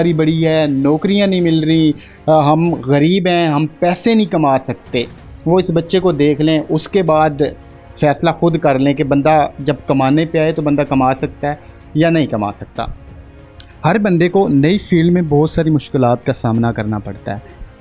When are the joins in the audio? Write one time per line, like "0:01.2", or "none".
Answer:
none